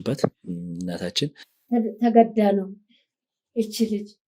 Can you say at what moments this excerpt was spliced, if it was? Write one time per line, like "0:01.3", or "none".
0:01.5